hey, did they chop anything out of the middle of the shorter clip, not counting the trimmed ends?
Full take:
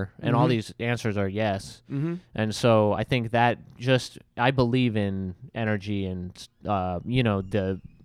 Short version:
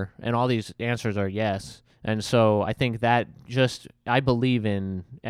yes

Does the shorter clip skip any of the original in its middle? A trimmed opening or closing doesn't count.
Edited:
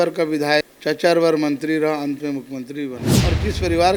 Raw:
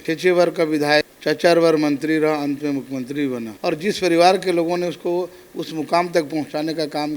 no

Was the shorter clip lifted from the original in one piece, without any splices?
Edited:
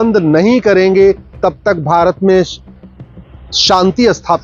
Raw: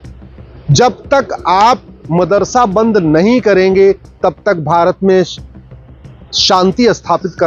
yes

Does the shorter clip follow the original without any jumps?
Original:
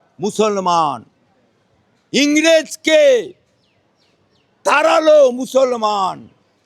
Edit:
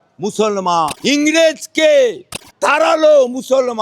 no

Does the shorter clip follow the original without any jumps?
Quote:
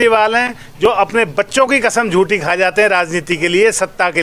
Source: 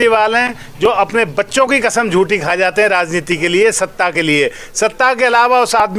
yes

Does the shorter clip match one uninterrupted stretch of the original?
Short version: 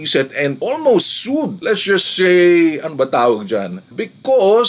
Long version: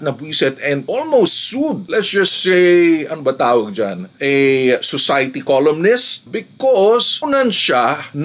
no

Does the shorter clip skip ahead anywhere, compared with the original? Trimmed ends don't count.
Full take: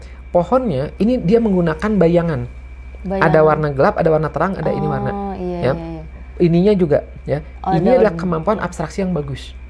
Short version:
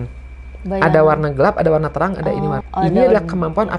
yes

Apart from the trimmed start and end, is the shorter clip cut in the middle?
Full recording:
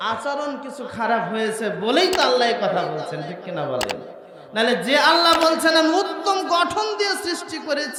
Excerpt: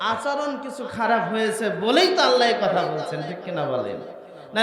no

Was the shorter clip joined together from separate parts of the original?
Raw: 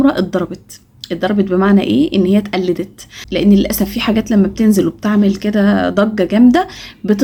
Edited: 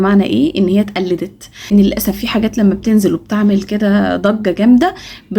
yes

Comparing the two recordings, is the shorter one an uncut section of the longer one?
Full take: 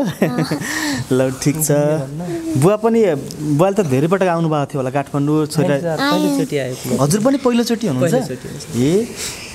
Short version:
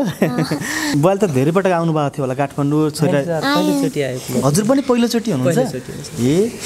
no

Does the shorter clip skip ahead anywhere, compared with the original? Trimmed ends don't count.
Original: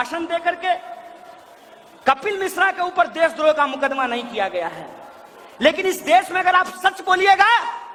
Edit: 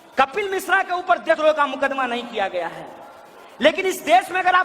yes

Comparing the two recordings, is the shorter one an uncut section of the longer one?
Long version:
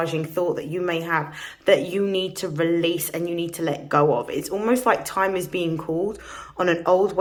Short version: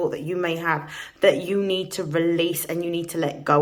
yes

